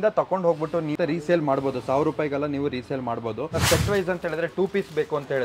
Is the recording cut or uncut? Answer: cut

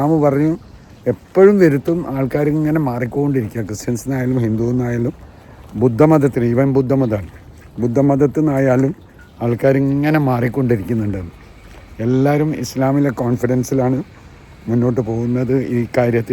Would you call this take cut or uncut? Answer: uncut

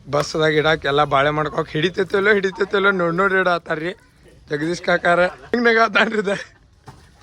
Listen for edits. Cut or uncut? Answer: cut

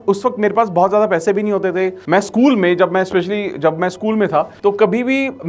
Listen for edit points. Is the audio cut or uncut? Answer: cut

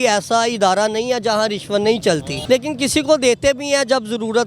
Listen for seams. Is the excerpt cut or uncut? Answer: cut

